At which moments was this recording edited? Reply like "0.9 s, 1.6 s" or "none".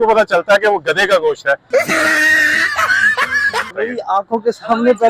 3.7 s